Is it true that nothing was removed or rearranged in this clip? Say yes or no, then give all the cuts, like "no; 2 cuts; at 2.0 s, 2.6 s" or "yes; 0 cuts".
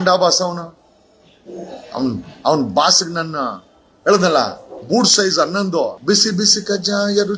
no; 1 cut; at 6.0 s